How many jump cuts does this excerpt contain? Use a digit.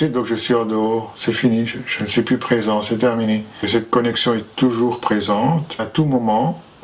2